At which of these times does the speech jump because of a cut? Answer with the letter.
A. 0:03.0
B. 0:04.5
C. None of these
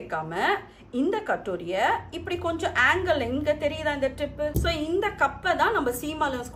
B